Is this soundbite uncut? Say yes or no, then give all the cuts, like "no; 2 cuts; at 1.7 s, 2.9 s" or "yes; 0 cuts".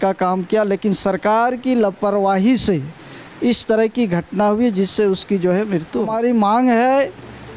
no; 1 cut; at 6.1 s